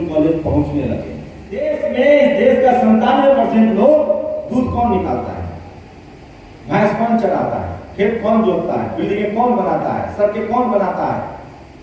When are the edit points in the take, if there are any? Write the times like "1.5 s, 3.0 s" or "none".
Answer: 1.7 s